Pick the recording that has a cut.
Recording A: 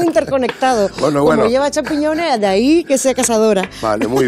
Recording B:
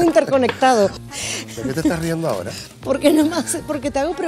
B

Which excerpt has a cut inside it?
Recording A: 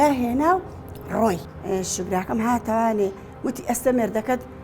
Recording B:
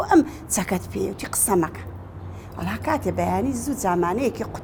A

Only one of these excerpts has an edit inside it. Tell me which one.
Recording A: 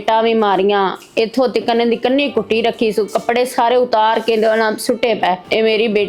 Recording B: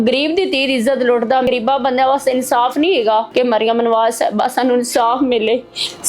B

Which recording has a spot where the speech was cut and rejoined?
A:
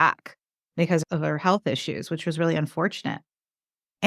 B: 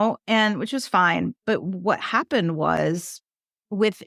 A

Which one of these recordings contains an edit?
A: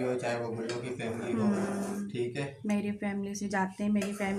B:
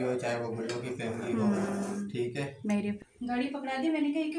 B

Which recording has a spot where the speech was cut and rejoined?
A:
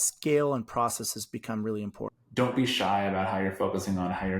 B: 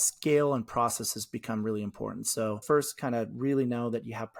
A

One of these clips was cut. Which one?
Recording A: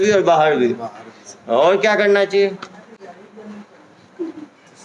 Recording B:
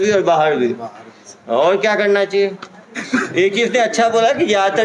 B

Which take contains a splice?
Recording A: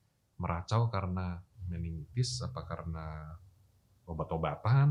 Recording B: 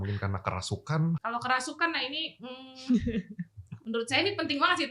B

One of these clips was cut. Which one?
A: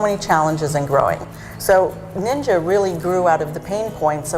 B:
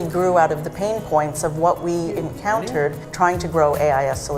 A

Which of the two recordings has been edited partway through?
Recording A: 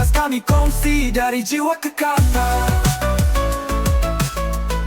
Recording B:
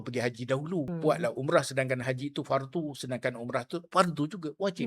B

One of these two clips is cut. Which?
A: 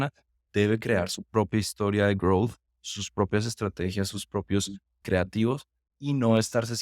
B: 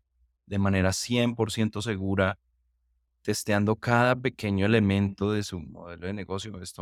A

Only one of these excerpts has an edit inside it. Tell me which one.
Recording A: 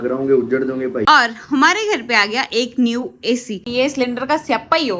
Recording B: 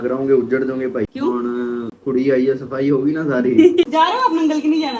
A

